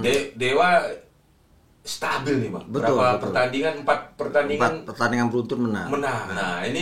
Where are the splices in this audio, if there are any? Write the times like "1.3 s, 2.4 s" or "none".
none